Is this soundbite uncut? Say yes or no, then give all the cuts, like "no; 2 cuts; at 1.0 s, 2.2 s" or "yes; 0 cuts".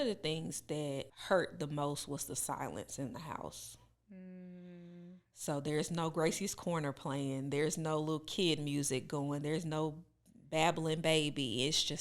no; 1 cut; at 1.1 s